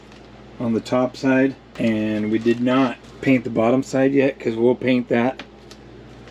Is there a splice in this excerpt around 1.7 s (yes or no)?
yes